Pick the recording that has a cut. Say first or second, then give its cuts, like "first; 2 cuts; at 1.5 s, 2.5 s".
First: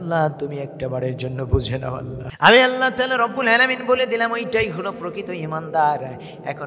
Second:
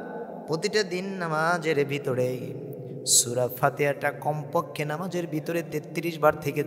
first; 1 cut; at 2.2 s